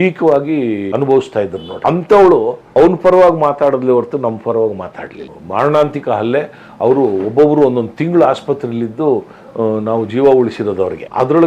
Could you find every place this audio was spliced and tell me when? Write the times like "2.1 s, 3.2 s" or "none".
0.9 s, 1.6 s, 2.6 s, 5.4 s